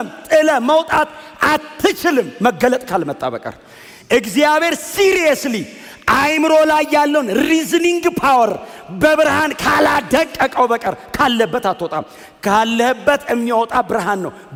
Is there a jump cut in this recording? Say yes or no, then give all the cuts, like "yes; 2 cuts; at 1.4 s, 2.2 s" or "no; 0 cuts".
no; 0 cuts